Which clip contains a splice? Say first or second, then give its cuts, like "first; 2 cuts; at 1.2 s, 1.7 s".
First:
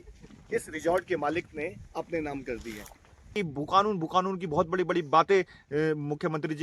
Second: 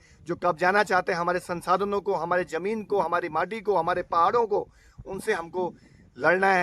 first; 1 cut; at 3.3 s